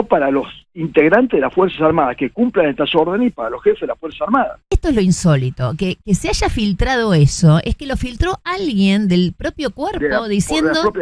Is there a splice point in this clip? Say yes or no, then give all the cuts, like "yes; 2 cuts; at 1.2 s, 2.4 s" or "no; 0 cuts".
yes; 1 cut; at 4.7 s